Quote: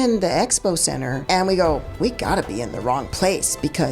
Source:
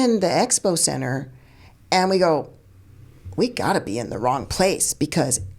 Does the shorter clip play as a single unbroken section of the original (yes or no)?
no